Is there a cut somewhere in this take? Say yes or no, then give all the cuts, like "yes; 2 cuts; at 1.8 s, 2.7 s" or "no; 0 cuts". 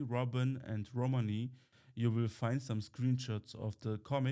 yes; 1 cut; at 1.7 s